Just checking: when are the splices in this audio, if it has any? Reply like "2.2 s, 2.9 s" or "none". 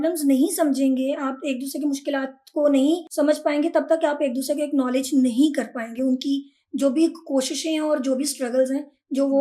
3.1 s